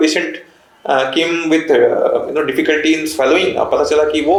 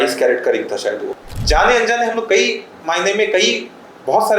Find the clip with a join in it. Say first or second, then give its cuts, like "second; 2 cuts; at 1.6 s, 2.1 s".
second; 1 cut; at 1.1 s